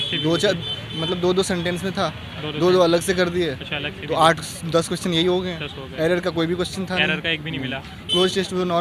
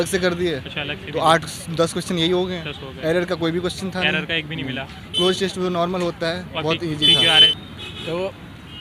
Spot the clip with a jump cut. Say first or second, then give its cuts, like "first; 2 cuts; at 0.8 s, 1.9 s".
second; 1 cut; at 7.5 s